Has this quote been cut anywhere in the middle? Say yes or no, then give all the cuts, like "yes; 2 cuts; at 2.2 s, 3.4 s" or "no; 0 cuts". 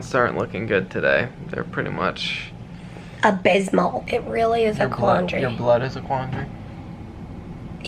yes; 1 cut; at 4.0 s